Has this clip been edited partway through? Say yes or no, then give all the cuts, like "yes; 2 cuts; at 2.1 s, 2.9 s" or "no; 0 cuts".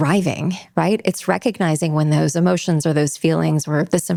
no; 0 cuts